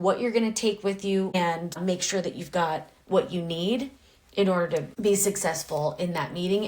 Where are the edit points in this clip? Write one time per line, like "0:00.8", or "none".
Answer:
0:01.4
0:04.9